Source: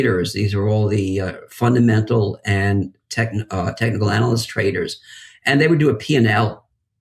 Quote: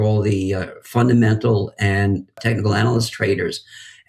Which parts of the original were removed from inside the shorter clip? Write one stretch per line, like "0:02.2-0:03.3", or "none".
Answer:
0:03.0-0:03.7